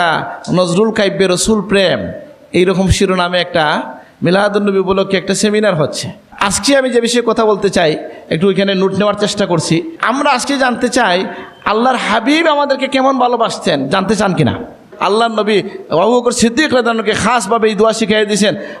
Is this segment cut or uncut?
cut